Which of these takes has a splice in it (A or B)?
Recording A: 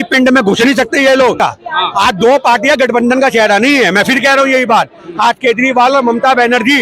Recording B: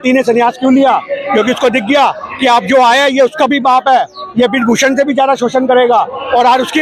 A